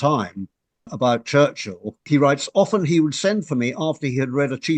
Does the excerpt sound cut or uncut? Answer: cut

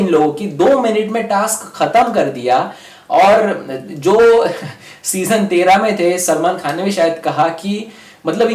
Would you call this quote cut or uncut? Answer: uncut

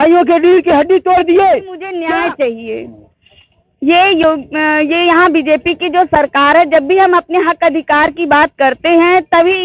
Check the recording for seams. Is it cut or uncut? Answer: cut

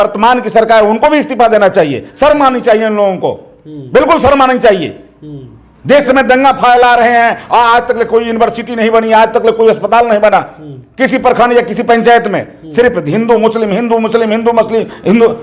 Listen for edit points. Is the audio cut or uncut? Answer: uncut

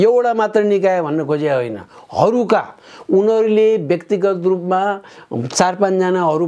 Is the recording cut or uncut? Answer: uncut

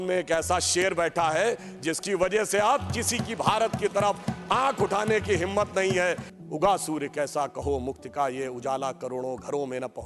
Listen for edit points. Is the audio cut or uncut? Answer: cut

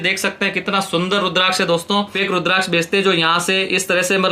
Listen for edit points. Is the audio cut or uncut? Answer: cut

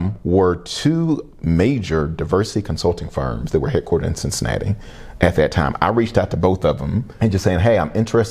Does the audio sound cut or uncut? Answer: cut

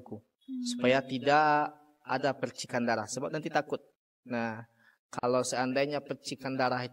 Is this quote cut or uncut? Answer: uncut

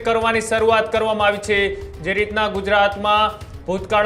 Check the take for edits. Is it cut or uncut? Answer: uncut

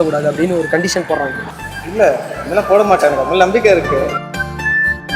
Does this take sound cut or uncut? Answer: cut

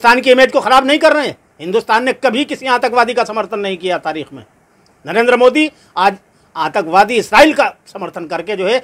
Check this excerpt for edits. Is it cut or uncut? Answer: uncut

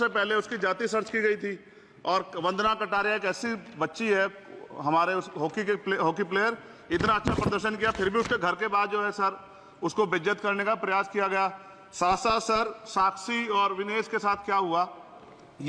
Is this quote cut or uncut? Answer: uncut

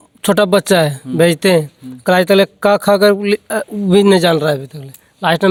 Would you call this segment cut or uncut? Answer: uncut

